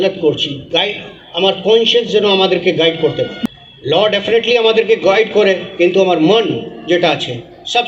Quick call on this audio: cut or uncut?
cut